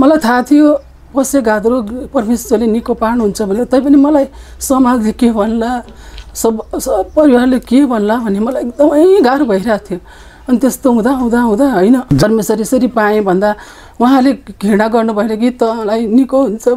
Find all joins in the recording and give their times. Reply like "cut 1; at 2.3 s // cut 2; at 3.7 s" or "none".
cut 1; at 12.2 s